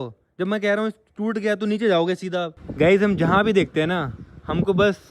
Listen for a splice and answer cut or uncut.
cut